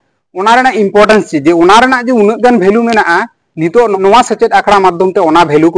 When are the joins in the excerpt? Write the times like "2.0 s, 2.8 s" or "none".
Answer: 4.0 s